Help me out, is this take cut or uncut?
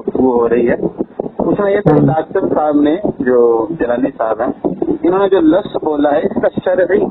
uncut